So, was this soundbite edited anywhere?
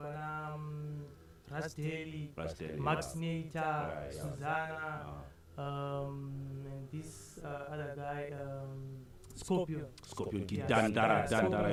no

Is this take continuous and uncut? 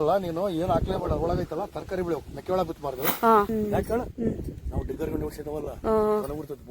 no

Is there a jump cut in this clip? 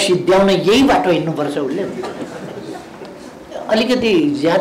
no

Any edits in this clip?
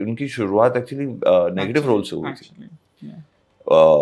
no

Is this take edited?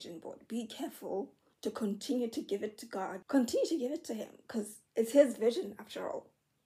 yes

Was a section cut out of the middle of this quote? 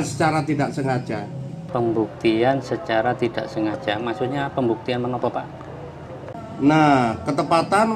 no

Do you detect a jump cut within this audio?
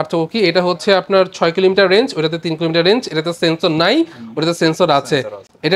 no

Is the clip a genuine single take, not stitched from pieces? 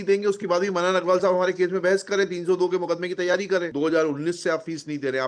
no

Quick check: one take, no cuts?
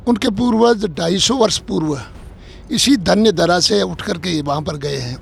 yes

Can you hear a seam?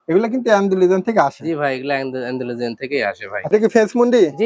yes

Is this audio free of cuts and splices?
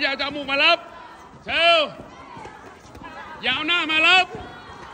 yes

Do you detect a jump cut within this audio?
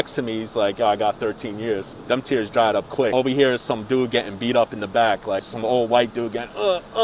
yes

